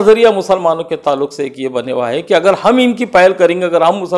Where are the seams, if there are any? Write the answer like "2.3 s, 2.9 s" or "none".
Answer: none